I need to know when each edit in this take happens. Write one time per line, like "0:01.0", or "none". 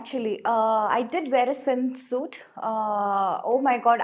none